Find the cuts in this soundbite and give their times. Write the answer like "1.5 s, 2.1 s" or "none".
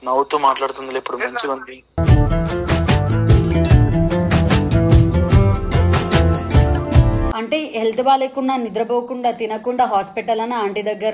7.3 s